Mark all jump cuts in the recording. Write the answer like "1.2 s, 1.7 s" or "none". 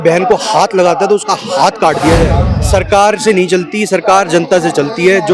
2.5 s

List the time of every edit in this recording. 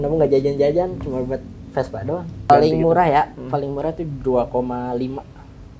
2.5 s

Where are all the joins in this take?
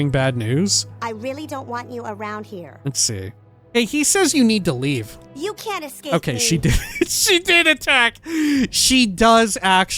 2.7 s, 3.5 s

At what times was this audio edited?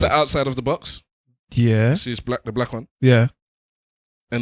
none

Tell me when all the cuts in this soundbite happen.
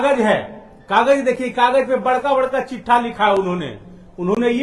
none

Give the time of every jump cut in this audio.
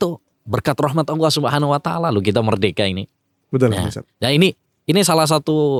none

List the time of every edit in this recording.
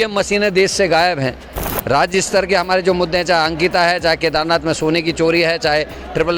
1.6 s

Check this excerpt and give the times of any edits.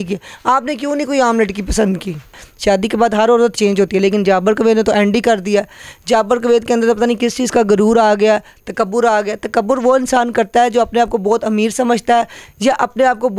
2.3 s

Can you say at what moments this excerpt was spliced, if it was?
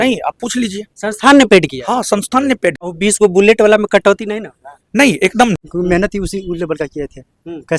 2.8 s, 5.7 s

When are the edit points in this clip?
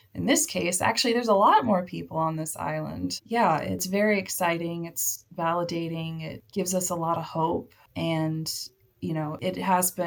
none

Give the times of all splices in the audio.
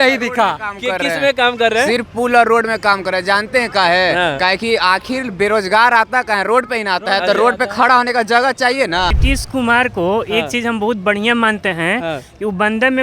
9.1 s

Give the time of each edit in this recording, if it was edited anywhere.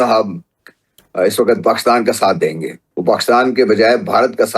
2.8 s

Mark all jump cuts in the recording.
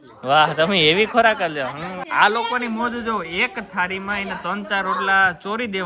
2.0 s

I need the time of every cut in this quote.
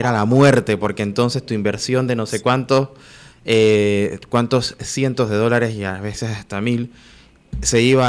none

